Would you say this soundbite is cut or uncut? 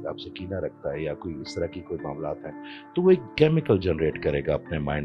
uncut